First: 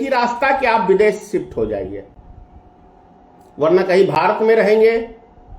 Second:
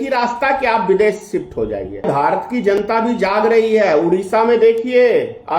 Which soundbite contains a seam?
second; 1 cut; at 2.1 s

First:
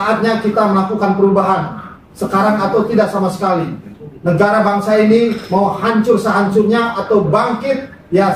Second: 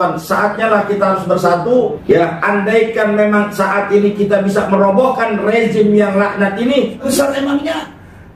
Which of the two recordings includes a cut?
second; 2 cuts; at 2.0 s, 7.1 s

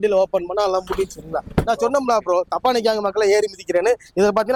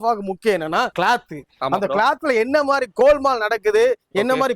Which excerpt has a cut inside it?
second; 1 cut; at 0.9 s

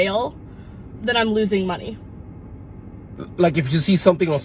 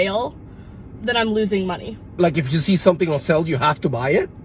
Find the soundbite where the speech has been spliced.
second; 1 cut; at 2.0 s

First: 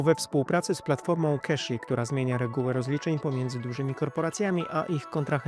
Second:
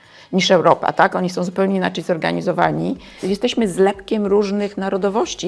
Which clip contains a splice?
second; 1 cut; at 3.1 s

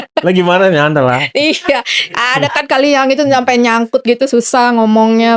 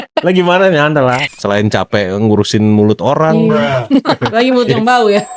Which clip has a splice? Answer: second; 1 cut; at 1.2 s

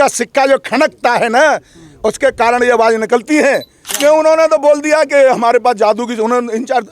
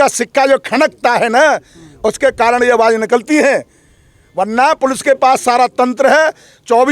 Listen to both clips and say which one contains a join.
first; 1 cut; at 3.8 s

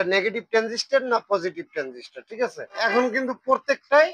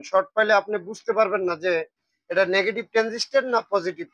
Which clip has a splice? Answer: first; 1 cut; at 2.8 s

